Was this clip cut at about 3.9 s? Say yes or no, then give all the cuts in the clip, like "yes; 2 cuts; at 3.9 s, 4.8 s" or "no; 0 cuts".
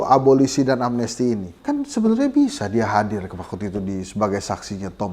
no; 1 cut; at 1.5 s